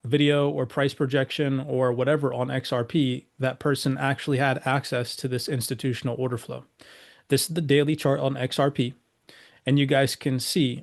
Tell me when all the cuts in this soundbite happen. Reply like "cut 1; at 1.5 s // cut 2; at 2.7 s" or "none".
none